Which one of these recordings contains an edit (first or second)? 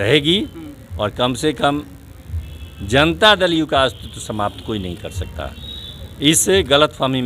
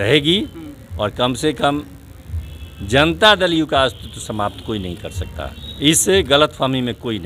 second